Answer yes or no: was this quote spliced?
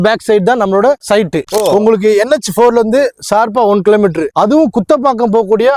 no